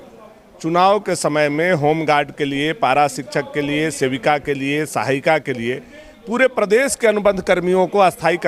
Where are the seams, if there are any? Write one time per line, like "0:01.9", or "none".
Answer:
none

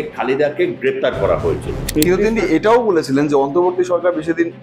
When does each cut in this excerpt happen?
0:01.9

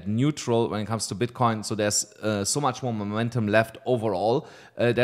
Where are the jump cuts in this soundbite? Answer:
none

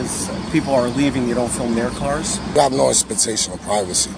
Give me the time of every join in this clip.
0:02.5

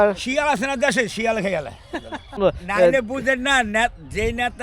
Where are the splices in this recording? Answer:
0:02.4

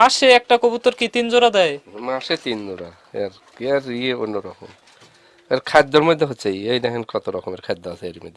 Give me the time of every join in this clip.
none

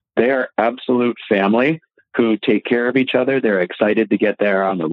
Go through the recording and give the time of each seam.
none

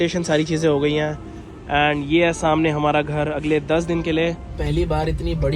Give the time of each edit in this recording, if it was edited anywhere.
0:04.5

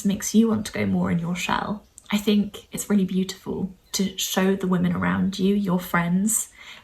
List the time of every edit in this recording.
0:01.9
0:02.7
0:03.8

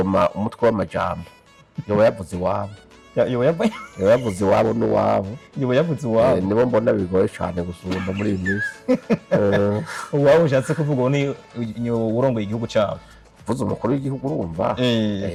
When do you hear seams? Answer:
none

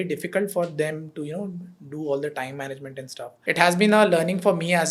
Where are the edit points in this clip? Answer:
0:03.3

